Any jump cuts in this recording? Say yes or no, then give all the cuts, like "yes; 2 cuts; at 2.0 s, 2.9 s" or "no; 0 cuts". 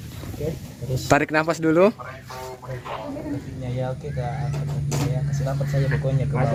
no; 0 cuts